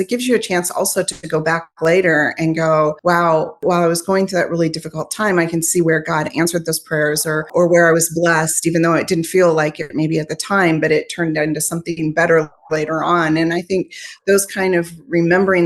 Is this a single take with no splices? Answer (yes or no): no